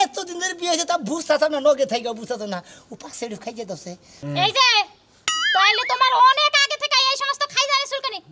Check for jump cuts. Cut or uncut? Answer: uncut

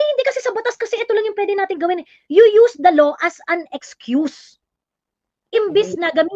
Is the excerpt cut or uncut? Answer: uncut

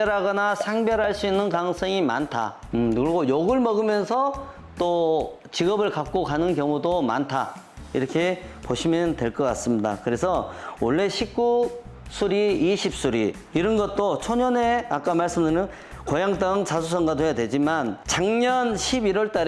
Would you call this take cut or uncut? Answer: uncut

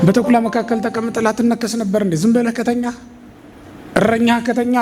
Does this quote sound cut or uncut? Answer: uncut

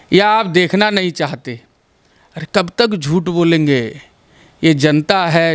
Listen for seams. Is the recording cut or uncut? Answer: uncut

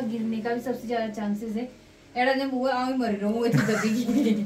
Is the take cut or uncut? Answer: uncut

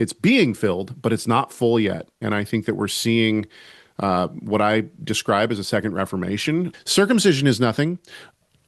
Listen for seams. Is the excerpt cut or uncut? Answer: cut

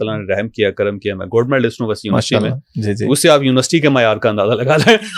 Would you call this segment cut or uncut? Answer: uncut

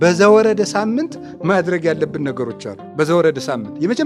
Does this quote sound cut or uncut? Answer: uncut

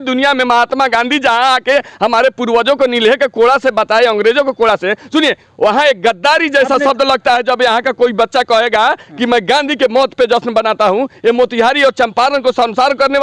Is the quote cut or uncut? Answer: uncut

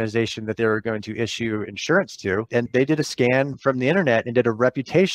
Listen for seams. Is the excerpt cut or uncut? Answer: uncut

